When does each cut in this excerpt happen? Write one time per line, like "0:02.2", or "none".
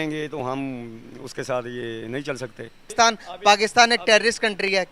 0:02.7